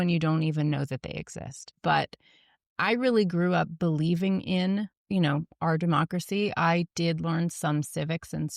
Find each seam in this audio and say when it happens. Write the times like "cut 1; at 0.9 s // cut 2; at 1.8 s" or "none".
cut 1; at 1.7 s // cut 2; at 5.0 s